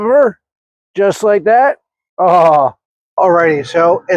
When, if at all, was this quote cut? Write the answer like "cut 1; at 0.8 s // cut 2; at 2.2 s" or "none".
cut 1; at 3.0 s